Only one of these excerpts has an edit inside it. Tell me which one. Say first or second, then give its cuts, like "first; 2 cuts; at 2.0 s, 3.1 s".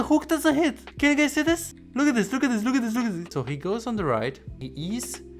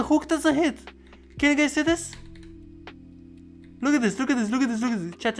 first; 4 cuts; at 0.8 s, 1.8 s, 3.2 s, 4.5 s